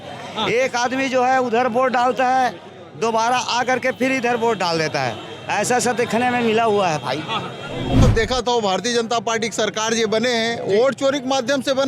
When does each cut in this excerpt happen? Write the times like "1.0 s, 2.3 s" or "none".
8.0 s